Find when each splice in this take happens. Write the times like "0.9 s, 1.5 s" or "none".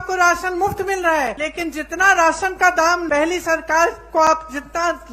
1.4 s, 3.0 s

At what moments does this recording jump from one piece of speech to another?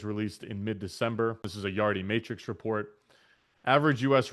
1.5 s

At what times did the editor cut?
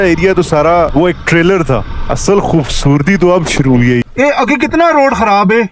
0.9 s, 2.0 s, 4.0 s

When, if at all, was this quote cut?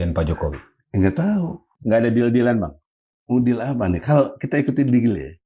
1.7 s

